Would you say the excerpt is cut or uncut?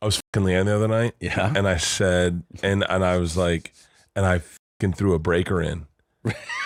uncut